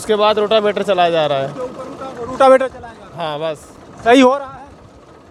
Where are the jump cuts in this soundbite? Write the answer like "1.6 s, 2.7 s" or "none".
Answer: none

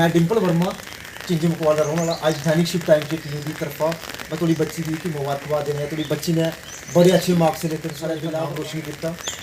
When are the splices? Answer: 8.2 s

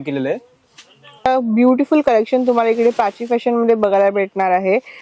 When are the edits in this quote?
1.3 s

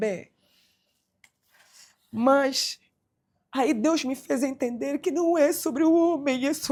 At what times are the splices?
none

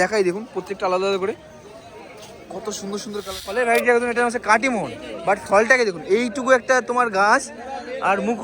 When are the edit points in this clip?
3.4 s

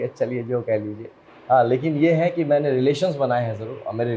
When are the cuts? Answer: none

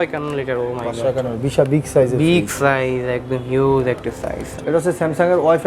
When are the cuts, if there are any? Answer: 4.6 s

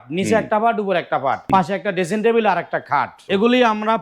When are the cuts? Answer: 1.5 s, 3.2 s

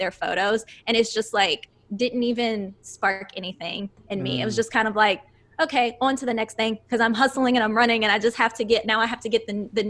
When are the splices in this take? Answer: none

